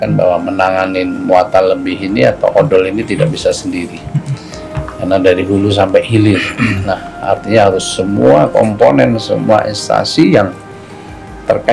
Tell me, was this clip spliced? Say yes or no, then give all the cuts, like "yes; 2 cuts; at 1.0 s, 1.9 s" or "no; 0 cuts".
no; 0 cuts